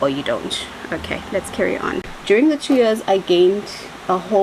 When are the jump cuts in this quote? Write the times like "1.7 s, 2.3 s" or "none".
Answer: 2.1 s